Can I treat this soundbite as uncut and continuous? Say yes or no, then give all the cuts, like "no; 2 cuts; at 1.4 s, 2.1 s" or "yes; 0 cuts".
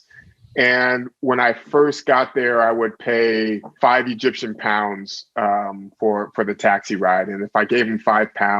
no; 1 cut; at 3.7 s